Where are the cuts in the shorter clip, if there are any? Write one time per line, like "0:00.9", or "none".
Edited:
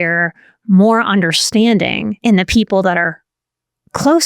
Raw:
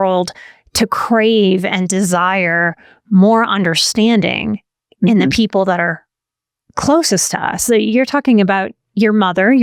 0:02.2